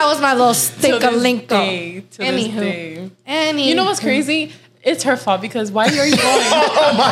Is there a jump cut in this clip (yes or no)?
no